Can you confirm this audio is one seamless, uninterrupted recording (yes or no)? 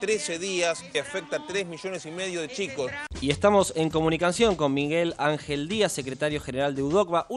no